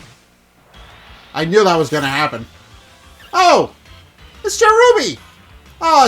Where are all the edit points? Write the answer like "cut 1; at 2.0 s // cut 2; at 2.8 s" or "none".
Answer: cut 1; at 1.3 s